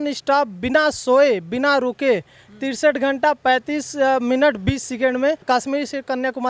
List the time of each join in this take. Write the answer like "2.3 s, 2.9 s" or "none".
5.4 s